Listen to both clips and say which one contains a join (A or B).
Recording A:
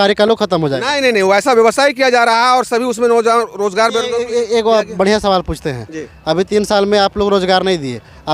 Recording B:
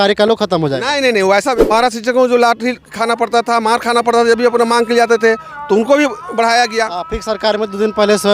B